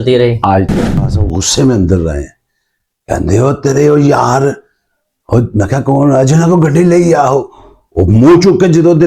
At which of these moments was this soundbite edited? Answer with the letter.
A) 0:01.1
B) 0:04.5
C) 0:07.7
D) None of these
A